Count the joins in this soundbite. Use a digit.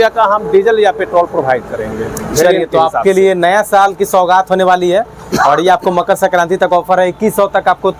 0